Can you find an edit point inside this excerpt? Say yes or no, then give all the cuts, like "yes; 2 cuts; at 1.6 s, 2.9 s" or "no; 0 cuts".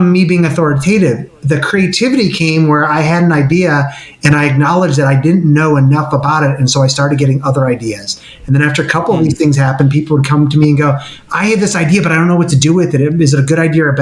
no; 0 cuts